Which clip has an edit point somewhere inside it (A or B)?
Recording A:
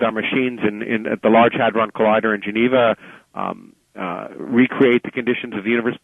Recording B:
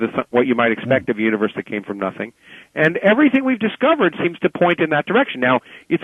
B